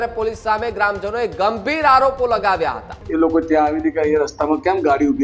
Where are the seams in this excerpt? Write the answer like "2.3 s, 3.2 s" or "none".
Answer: 3.0 s